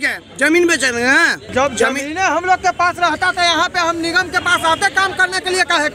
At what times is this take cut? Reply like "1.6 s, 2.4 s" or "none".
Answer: 1.4 s